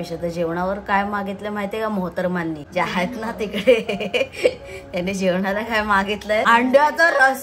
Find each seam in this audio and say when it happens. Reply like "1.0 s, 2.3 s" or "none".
none